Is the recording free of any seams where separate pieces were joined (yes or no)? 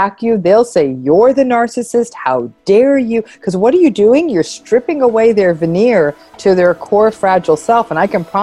yes